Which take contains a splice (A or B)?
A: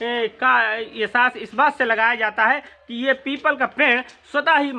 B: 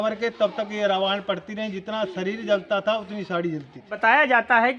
B